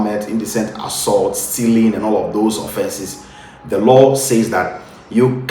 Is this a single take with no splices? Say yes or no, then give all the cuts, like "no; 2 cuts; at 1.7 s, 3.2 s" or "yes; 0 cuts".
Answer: yes; 0 cuts